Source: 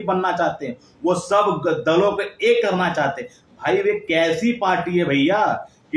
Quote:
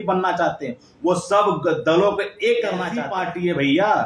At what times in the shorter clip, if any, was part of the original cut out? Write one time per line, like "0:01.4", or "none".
0:03.0